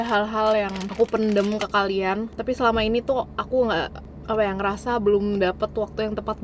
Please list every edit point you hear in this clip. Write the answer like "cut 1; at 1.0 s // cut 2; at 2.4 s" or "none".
none